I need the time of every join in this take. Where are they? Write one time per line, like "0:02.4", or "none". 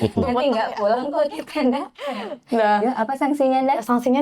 none